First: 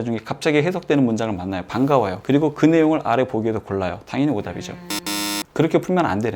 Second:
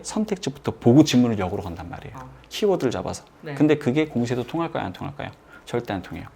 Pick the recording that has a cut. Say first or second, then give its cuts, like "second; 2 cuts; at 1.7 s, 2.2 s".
first; 2 cuts; at 2.2 s, 5.4 s